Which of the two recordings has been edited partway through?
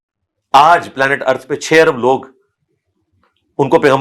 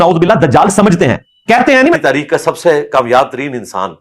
second; 1 cut; at 2.0 s

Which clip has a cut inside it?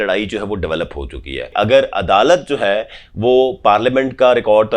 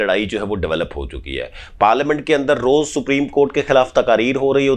first; 1 cut; at 1.5 s

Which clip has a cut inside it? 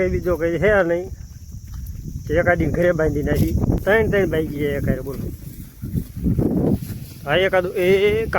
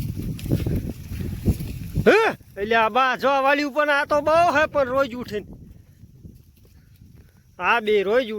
first; 1 cut; at 3.8 s

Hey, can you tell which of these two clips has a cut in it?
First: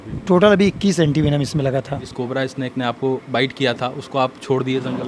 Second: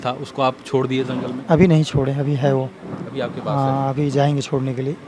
first; 1 cut; at 2.1 s

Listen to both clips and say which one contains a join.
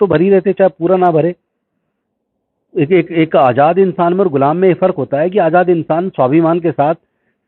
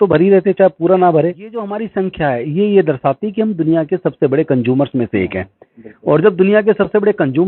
second; 1 cut; at 1.8 s

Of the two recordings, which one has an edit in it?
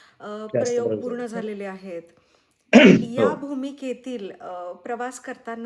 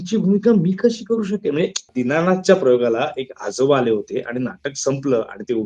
second; 1 cut; at 1.8 s

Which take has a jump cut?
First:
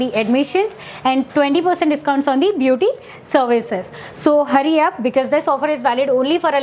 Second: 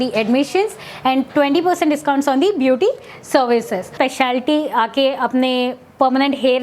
second; 1 cut; at 3.9 s

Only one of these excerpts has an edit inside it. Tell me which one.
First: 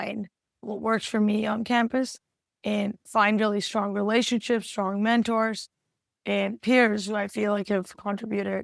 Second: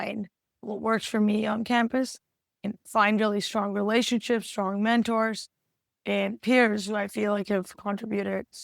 second; 1 cut; at 2.7 s

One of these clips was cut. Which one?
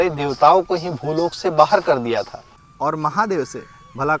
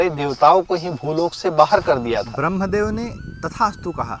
first; 1 cut; at 2.3 s

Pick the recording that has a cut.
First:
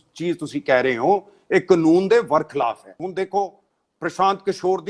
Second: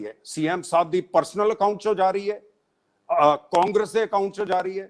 first; 1 cut; at 2.9 s

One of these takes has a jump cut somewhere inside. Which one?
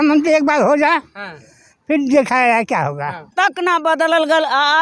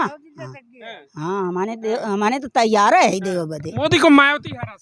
first; 1 cut; at 3.3 s

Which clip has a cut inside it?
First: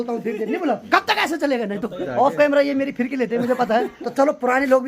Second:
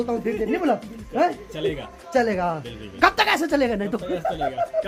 first; 3 cuts; at 0.8 s, 2.0 s, 4.0 s

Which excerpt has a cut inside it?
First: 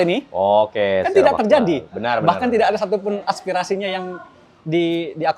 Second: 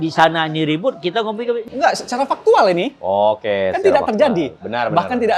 second; 1 cut; at 1.7 s

